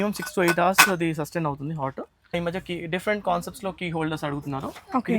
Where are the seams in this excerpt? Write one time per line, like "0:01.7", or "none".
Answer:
0:02.4